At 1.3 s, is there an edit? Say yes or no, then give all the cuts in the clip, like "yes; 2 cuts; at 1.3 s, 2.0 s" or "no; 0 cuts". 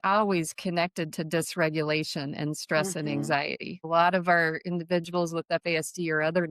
no; 1 cut; at 3.8 s